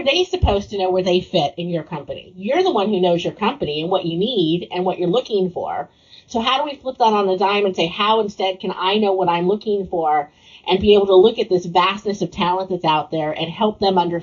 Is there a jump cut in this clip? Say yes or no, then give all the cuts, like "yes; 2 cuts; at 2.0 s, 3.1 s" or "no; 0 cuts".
no; 0 cuts